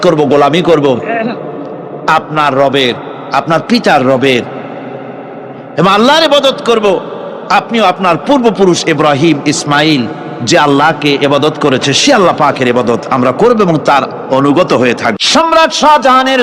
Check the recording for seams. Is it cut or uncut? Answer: cut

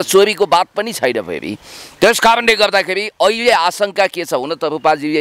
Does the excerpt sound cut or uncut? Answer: uncut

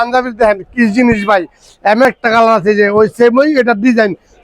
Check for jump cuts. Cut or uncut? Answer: cut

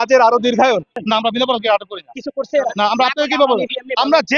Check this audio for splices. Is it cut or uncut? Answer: cut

